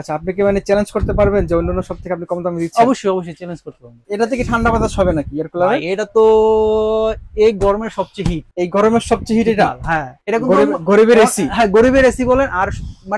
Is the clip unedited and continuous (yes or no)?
no